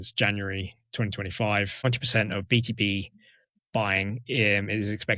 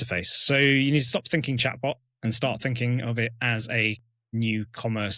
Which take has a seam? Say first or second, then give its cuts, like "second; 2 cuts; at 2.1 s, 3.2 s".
first; 1 cut; at 1.8 s